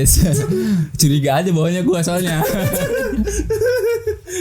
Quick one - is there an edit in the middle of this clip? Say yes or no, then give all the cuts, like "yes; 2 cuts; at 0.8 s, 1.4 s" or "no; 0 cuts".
no; 0 cuts